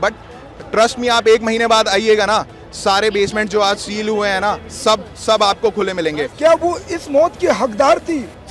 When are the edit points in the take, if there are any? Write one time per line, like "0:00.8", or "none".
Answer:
0:06.3